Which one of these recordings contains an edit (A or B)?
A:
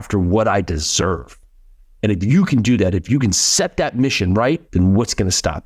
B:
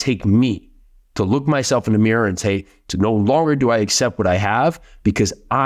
A